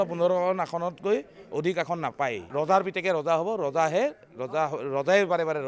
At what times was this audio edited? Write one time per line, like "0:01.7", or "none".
0:02.4